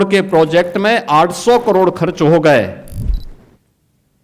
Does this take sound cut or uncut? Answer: uncut